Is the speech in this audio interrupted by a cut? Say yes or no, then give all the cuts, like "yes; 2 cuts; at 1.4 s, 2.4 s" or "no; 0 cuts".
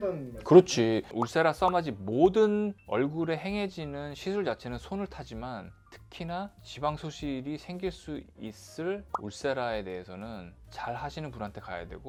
no; 0 cuts